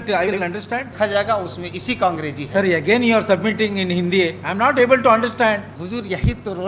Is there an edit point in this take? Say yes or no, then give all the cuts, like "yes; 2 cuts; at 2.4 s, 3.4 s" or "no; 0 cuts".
yes; 2 cuts; at 0.9 s, 5.7 s